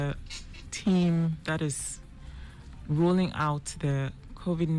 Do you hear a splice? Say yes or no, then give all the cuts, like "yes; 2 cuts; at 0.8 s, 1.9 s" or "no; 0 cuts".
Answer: no; 0 cuts